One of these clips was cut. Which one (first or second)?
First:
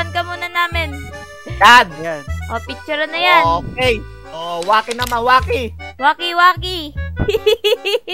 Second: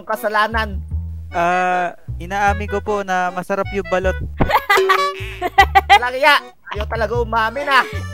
second